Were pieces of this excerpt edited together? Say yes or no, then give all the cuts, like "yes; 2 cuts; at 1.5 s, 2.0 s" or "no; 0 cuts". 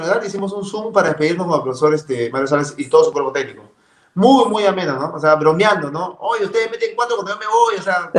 no; 0 cuts